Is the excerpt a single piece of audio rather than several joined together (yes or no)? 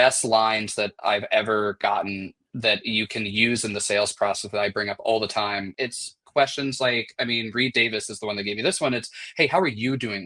no